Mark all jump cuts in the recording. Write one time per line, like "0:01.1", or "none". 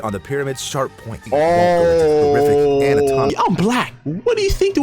0:01.2
0:03.3